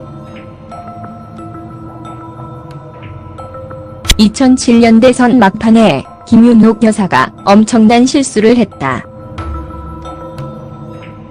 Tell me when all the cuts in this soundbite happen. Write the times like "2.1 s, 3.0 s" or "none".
9.9 s